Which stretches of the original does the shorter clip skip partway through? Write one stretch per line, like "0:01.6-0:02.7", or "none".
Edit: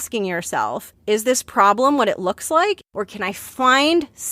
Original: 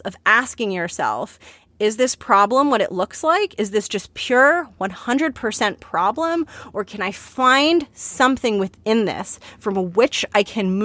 0:01.4-0:01.6
0:03.5-0:06.6